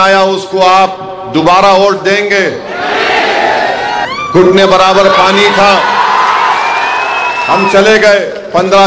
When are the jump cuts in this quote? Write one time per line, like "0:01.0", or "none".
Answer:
0:04.1

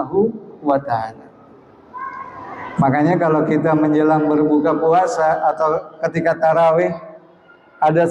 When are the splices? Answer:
none

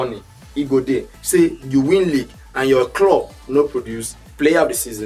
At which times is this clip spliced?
none

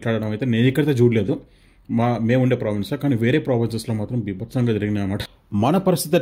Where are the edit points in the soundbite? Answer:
0:05.2

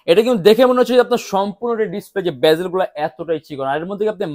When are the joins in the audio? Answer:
none

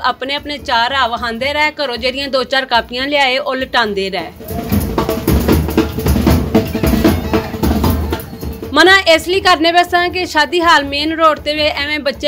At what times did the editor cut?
0:04.5

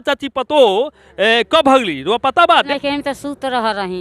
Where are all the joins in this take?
0:02.7

